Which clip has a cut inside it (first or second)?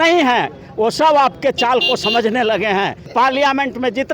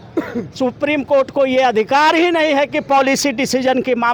first